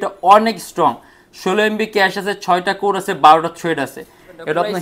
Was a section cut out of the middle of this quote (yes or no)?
no